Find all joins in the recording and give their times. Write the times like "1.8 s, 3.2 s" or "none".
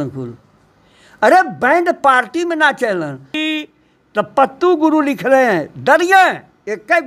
3.4 s